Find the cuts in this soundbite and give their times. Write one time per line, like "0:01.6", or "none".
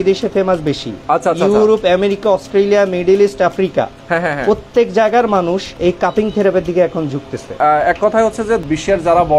0:00.9
0:05.7
0:07.5
0:08.6